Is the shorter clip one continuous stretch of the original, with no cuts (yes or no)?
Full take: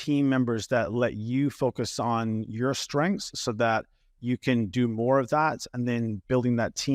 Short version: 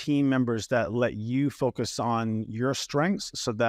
yes